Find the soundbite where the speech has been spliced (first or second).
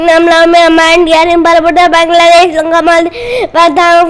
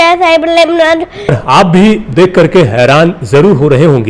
second